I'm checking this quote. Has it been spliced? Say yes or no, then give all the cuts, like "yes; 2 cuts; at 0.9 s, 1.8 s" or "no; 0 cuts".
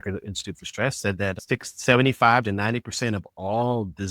yes; 1 cut; at 1.4 s